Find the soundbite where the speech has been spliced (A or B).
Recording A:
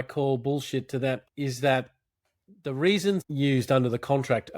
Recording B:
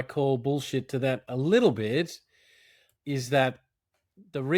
A